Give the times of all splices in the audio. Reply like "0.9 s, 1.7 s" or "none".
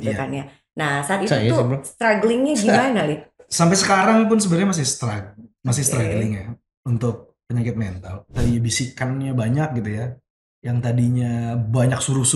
3.4 s, 8.3 s